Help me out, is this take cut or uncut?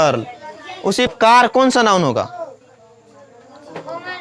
cut